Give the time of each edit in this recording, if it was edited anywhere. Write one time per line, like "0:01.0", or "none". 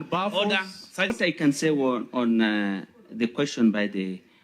0:01.1

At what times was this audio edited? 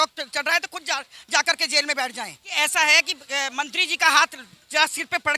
0:02.4

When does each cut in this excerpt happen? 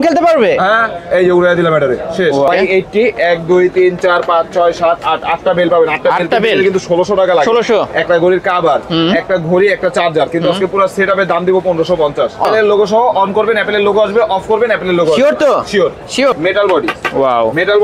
0:02.5
0:12.5
0:16.3

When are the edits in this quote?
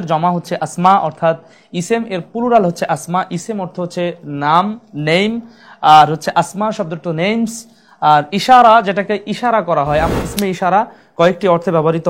0:10.1

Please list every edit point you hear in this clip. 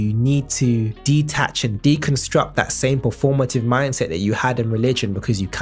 none

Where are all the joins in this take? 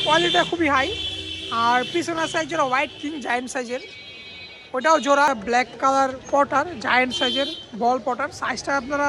0:05.3

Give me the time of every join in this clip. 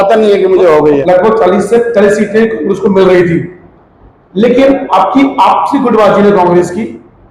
0:01.0

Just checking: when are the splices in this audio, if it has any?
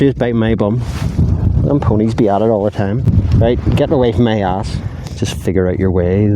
0:03.1
0:04.7

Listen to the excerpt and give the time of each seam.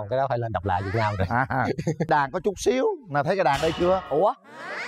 0:02.1

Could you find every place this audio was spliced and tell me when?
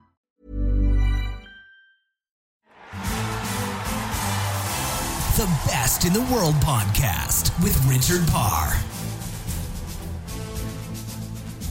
0:02.6

